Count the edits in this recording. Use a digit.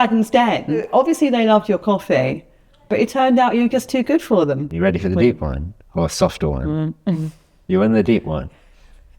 2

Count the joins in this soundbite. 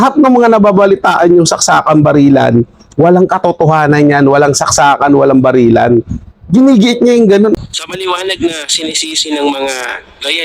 1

